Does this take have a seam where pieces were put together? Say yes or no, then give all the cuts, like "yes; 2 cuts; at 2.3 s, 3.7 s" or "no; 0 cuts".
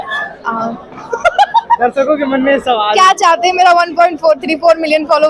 no; 0 cuts